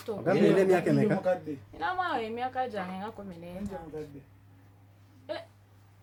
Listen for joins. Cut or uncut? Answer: uncut